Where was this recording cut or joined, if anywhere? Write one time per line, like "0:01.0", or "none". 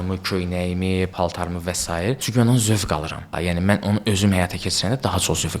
0:01.1
0:03.3